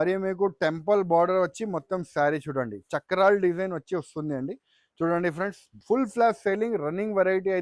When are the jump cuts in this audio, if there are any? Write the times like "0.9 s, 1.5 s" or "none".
none